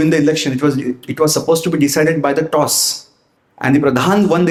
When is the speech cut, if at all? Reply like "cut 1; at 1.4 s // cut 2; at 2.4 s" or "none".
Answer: none

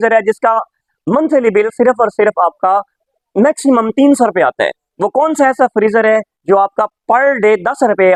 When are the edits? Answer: none

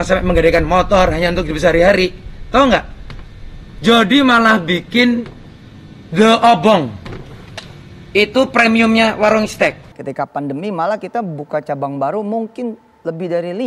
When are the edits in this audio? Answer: cut 1; at 9.9 s

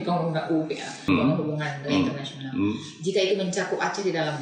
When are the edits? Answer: cut 1; at 1.1 s

